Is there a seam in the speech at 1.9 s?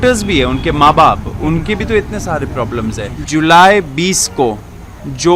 no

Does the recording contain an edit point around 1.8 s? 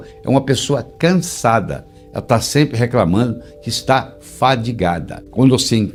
no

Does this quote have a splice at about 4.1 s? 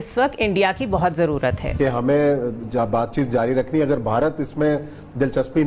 no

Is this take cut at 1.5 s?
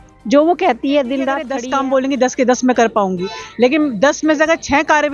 yes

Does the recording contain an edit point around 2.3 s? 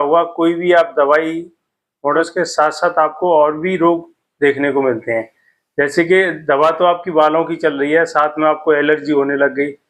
yes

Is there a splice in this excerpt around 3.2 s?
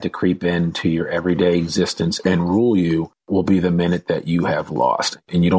yes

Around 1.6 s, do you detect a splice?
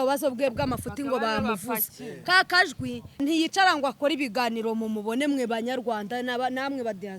no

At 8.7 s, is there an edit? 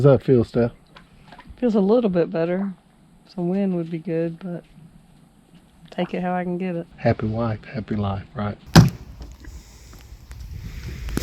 yes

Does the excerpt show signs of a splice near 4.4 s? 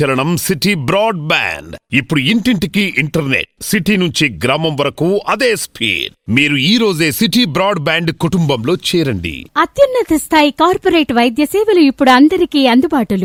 no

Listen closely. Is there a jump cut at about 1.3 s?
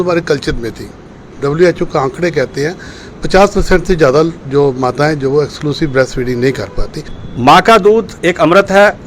yes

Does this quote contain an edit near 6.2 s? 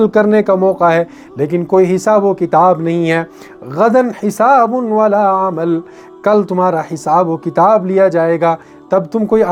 no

